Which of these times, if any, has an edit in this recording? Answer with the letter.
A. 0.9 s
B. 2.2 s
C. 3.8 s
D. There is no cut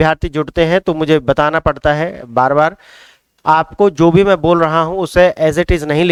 D